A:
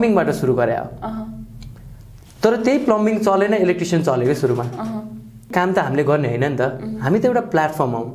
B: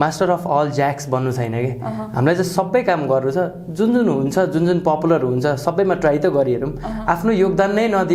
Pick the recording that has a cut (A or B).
A